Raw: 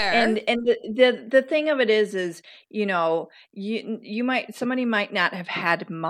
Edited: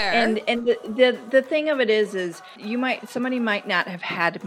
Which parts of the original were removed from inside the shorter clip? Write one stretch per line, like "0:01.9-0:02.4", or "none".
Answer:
0:02.5-0:04.0

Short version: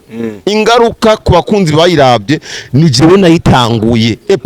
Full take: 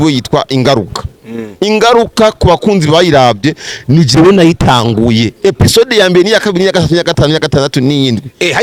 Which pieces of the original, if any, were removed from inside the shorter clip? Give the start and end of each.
none

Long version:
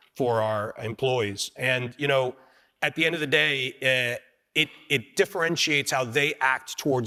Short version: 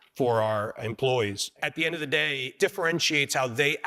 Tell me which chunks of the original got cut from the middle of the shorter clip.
0:01.4-0:02.7
0:03.7-0:05.1

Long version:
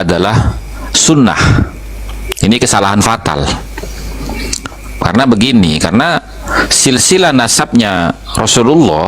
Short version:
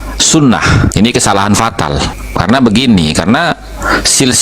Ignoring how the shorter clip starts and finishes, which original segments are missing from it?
0:01.7-0:02.4
0:03.7-0:04.8

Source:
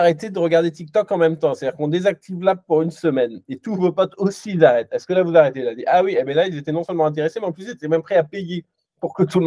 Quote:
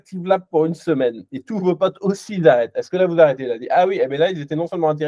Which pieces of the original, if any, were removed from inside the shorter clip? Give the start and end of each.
none

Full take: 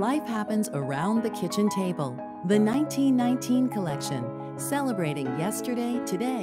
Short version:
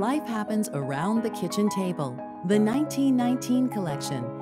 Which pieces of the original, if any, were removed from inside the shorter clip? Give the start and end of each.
none

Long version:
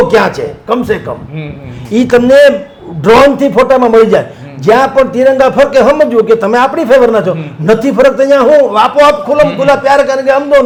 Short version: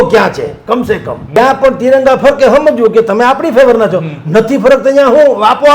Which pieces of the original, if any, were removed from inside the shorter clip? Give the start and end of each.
0:01.2-0:04.6

